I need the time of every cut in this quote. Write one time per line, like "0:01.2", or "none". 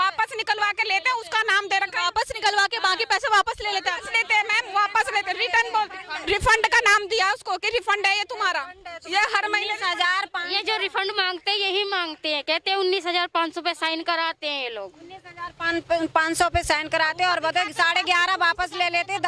none

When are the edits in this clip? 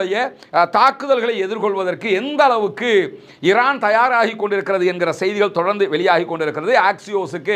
none

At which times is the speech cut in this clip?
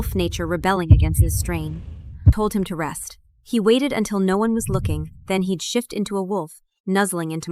0:02.3

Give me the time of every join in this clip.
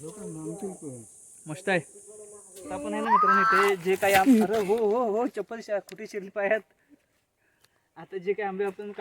0:02.9

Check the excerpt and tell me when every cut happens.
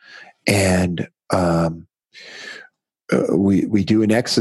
none

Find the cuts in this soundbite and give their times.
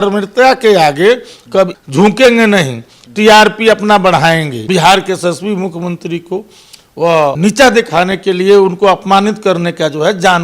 0:01.8
0:04.5
0:07.4

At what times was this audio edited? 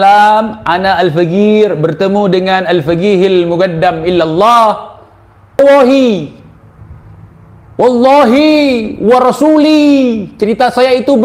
0:05.6

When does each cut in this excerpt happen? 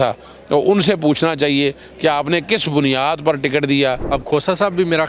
0:04.0

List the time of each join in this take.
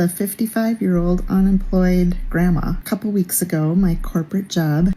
0:02.8

